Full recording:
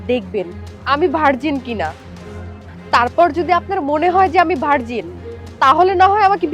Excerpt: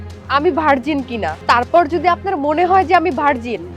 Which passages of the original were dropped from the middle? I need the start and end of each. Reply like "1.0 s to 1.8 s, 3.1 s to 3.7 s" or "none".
1.9 s to 2.8 s